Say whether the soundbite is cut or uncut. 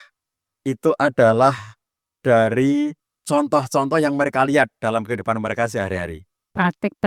cut